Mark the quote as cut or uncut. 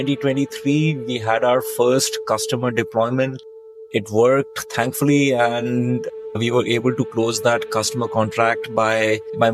uncut